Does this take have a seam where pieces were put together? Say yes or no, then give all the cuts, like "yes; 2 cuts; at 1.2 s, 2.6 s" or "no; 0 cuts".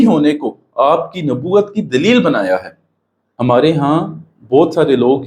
yes; 1 cut; at 3.4 s